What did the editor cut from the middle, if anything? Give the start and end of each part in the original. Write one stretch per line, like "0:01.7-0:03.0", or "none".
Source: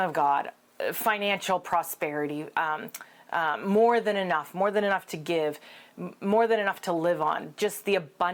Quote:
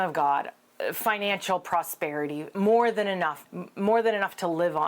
0:02.5-0:03.6
0:04.5-0:05.8